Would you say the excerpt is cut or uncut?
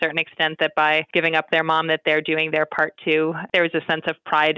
cut